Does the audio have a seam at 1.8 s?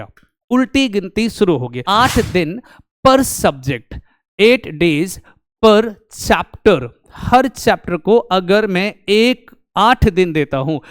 yes; 1 cut; at 1.8 s

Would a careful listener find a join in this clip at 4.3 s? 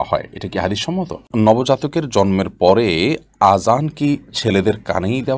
no; 1 cut; at 1.3 s

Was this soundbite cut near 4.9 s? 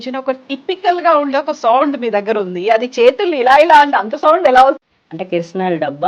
yes; 1 cut; at 4.9 s

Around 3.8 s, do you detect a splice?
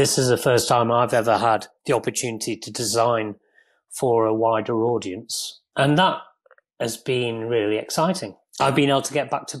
no; 2 cuts; at 5.6 s, 8.4 s

